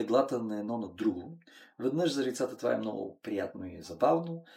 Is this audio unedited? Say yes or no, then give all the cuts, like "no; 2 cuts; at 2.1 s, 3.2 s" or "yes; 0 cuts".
yes; 0 cuts